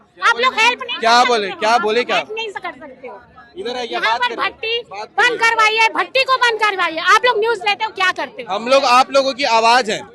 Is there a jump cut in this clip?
no; 0 cuts

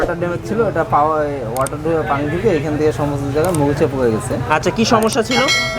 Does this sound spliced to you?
no; 0 cuts

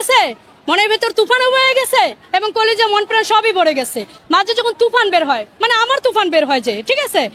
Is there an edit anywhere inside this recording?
yes; 1 cut; at 4.1 s

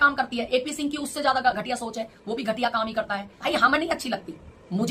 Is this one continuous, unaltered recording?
no; 1 cut; at 3.3 s

